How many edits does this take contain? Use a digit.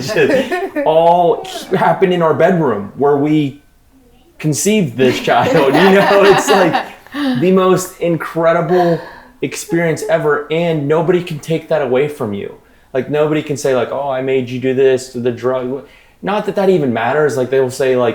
0